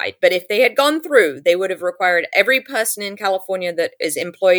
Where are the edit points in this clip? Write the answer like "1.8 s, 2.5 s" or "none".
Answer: none

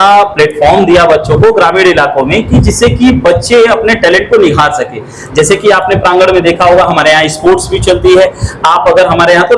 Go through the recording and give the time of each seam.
none

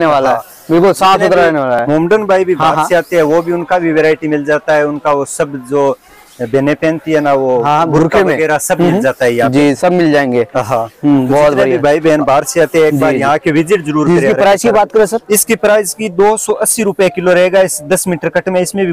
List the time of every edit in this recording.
none

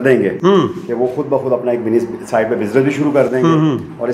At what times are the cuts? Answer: none

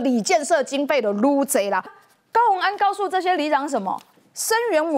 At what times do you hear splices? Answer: 1.9 s

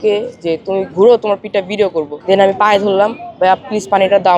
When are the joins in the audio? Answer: 2.1 s

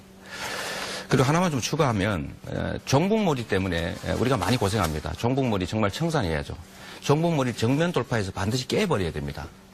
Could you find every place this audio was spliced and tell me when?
none

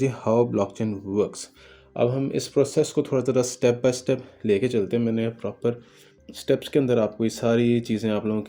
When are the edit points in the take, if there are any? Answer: none

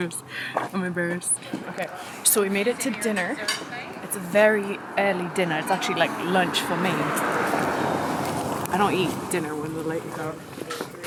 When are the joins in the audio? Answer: none

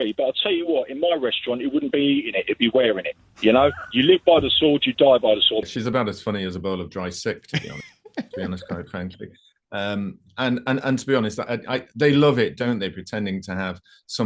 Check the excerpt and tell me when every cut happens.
5.6 s

